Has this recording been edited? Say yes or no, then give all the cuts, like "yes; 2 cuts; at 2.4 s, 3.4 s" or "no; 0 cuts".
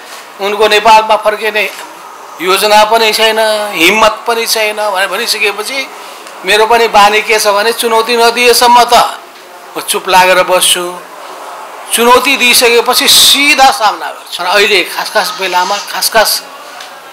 yes; 1 cut; at 14.2 s